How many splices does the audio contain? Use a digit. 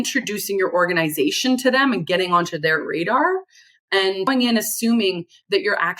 1